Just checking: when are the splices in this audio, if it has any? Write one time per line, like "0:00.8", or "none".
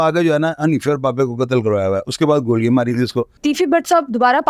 0:03.4